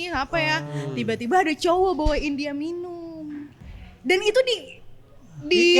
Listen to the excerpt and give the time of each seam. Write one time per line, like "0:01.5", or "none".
0:03.6